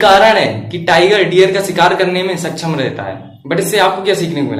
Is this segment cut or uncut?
uncut